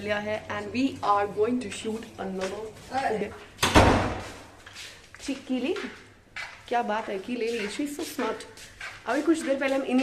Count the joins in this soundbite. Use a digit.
1